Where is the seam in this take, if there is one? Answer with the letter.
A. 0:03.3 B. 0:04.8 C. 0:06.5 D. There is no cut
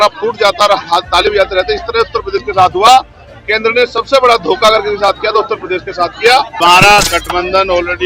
C